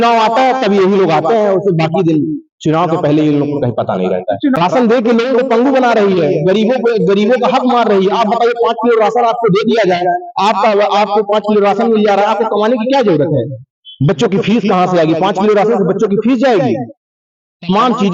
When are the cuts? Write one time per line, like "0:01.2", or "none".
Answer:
0:04.6